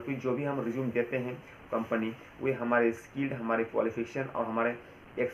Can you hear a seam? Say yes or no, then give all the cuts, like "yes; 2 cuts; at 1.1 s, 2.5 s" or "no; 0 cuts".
no; 0 cuts